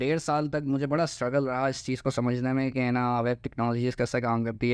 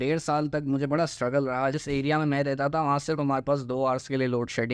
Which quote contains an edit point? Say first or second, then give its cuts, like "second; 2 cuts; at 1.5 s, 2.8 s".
second; 1 cut; at 1.8 s